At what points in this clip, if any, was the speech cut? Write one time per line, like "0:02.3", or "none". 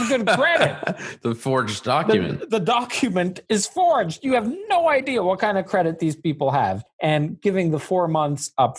0:06.9